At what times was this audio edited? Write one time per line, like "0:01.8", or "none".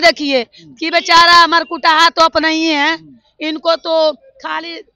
none